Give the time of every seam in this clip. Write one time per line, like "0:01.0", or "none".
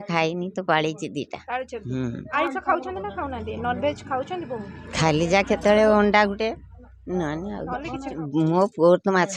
0:02.3
0:08.2